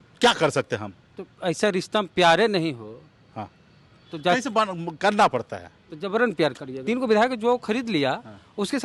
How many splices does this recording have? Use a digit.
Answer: 1